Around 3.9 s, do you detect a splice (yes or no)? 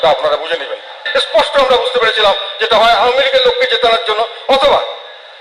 no